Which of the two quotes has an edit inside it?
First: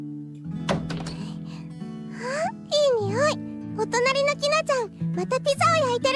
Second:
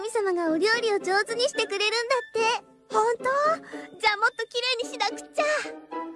second; 1 cut; at 4.4 s

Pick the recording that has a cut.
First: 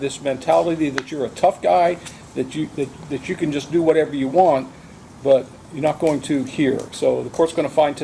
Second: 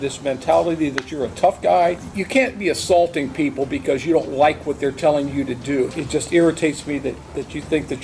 second; 2 cuts; at 2.1 s, 5.9 s

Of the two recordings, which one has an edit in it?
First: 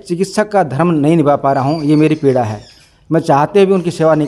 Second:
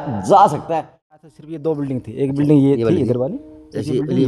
second; 1 cut; at 1.2 s

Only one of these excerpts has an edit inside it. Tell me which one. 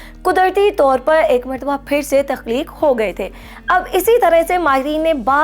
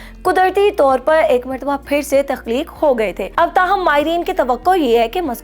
second; 1 cut; at 3.2 s

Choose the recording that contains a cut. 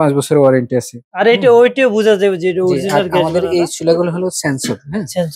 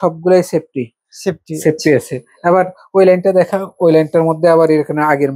first; 1 cut; at 1.0 s

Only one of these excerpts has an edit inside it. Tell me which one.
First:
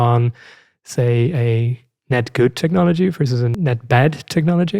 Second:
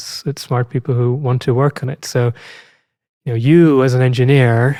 first; 1 cut; at 3.5 s

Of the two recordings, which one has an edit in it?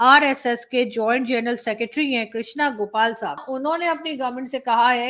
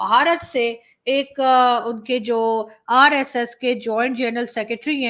first; 1 cut; at 3.4 s

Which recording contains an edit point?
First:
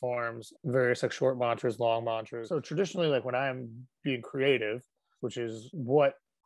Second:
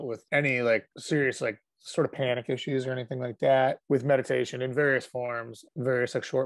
first; 1 cut; at 2.3 s

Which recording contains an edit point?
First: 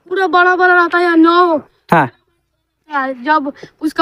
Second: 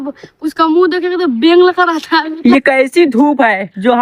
second; 1 cut; at 2.3 s

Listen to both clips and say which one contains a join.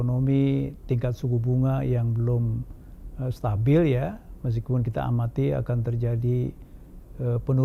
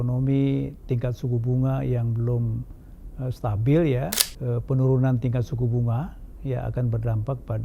second; 1 cut; at 4.3 s

